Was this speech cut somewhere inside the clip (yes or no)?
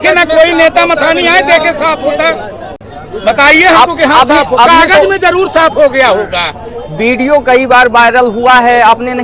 no